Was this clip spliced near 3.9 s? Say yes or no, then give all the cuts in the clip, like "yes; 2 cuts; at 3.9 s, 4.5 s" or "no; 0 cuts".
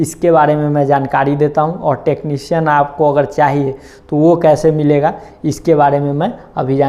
no; 0 cuts